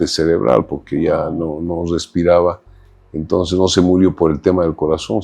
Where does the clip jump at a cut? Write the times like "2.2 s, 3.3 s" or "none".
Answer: none